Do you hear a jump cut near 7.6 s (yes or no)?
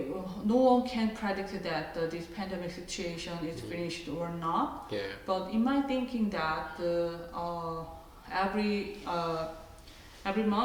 no